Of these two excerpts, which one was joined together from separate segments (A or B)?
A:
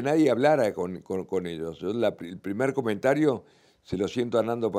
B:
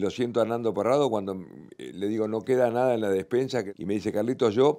B